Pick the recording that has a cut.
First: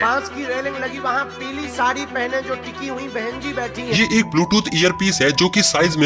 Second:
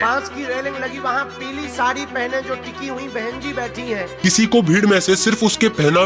first; 1 cut; at 3.9 s

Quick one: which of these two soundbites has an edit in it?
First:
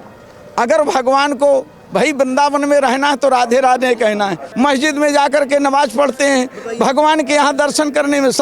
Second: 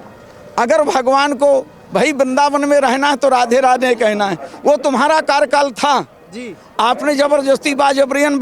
first; 1 cut; at 4.4 s

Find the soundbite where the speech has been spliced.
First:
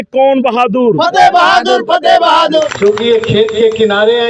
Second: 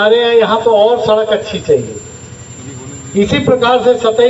first; 1 cut; at 2.6 s

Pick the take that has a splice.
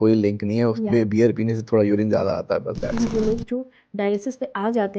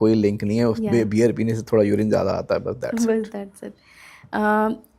first; 1 cut; at 3.1 s

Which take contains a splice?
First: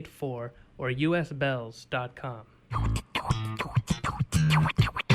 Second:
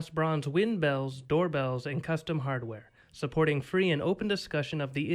first; 1 cut; at 2.8 s

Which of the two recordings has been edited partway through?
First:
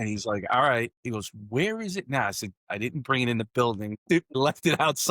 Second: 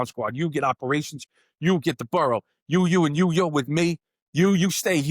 first; 1 cut; at 4.0 s

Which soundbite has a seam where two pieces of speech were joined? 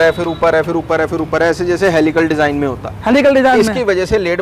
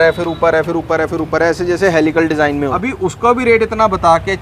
second; 1 cut; at 2.8 s

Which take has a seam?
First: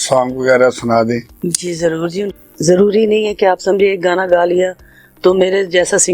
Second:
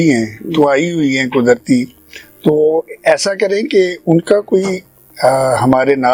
first; 1 cut; at 2.3 s

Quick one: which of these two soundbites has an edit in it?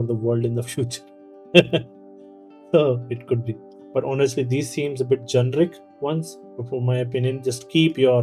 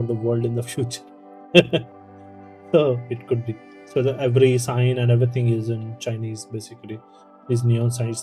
first; 2 cuts; at 3.7 s, 6.4 s

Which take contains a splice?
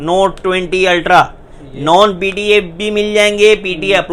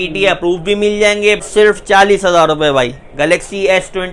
second; 1 cut; at 1.5 s

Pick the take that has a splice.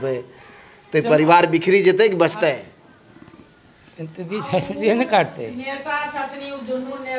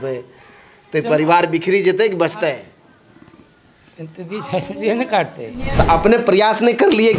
second; 1 cut; at 5.8 s

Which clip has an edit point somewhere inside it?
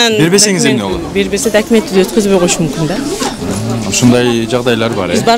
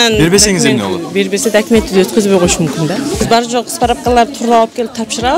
second; 1 cut; at 3.2 s

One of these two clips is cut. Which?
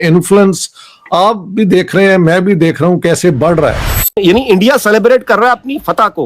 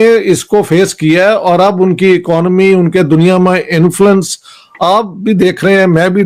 first; 1 cut; at 4.2 s

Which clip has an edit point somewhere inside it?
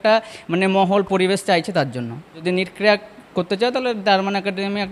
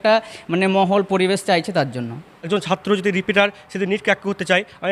second; 1 cut; at 2.5 s

